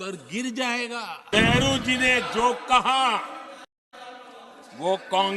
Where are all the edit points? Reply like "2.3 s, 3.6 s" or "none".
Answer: 1.3 s